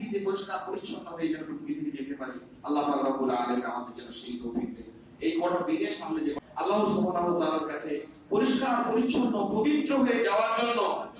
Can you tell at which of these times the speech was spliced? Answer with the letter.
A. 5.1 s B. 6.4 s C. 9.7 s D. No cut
B